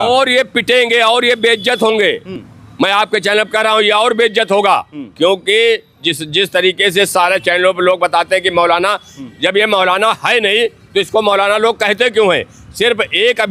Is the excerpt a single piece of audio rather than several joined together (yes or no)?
yes